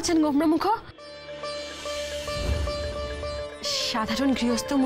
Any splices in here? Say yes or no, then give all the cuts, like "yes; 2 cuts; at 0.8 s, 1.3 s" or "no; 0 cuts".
yes; 1 cut; at 3.8 s